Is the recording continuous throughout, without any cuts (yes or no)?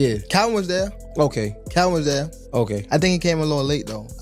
yes